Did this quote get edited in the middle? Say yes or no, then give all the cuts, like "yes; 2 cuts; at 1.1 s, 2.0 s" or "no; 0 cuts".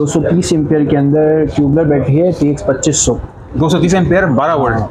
no; 0 cuts